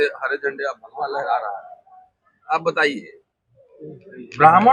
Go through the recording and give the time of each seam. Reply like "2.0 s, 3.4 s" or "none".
none

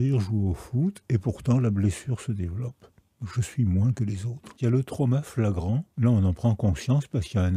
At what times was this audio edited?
4.5 s, 5.9 s

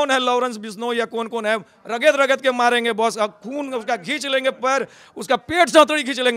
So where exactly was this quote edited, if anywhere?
none

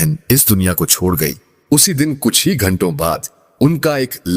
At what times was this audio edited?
none

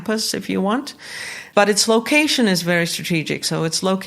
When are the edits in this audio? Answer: 1.4 s

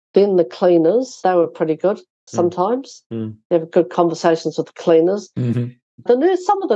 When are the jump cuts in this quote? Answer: 1.2 s, 6.0 s

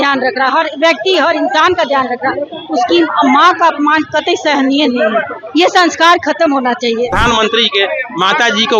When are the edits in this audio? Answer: 7.2 s

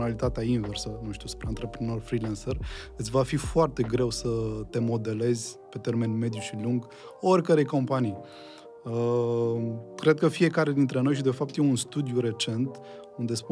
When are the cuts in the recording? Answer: none

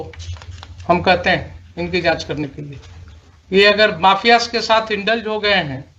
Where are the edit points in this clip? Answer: none

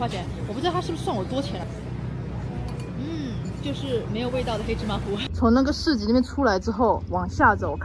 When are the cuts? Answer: 1.6 s, 5.2 s

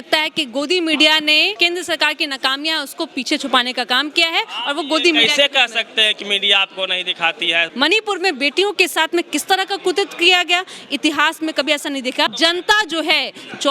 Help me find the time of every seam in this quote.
1.5 s, 7.7 s, 12.3 s

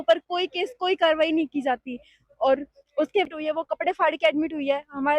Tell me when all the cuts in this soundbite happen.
3.3 s

